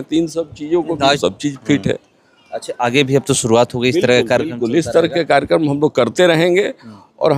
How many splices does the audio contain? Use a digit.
1